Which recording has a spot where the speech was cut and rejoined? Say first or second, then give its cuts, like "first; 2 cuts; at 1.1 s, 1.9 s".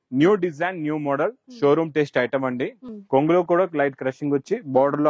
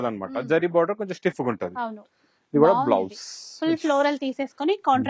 first; 1 cut; at 2.8 s